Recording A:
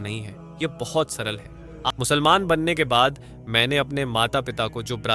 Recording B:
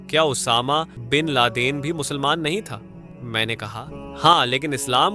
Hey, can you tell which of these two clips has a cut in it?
A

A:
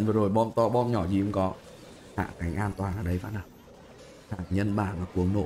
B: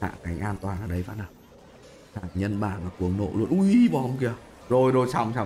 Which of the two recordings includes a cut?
B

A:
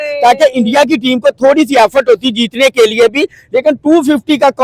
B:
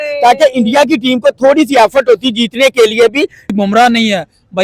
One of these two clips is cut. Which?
B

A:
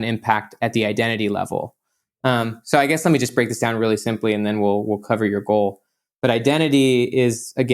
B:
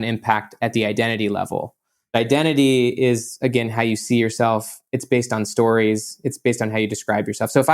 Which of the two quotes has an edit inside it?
B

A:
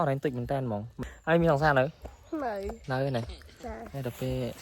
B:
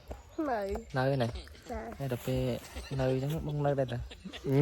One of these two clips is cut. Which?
A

